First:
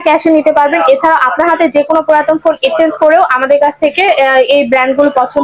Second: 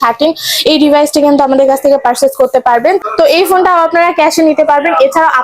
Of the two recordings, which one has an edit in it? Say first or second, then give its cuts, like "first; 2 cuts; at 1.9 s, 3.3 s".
second; 1 cut; at 3.0 s